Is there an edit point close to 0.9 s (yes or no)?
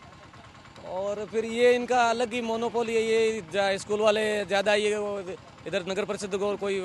no